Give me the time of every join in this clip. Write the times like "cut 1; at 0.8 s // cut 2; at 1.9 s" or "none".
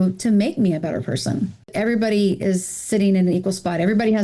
cut 1; at 1.7 s